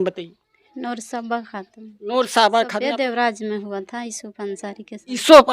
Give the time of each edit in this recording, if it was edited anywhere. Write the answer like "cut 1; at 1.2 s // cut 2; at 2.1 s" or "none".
cut 1; at 2.7 s